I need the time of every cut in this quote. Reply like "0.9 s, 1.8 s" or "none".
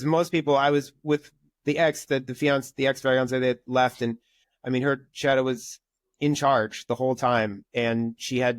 none